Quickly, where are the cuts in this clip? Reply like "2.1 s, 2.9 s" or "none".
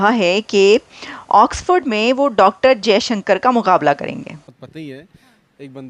4.6 s